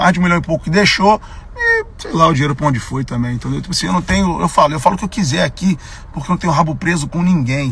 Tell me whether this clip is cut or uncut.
uncut